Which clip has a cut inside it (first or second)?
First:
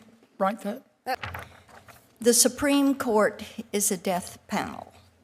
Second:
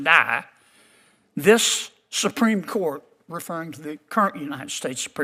first